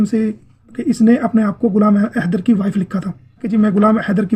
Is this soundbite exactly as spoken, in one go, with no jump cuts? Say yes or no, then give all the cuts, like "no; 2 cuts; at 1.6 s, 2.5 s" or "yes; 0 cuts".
no; 2 cuts; at 0.8 s, 3.4 s